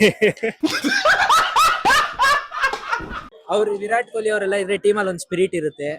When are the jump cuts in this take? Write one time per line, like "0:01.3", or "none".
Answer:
0:03.2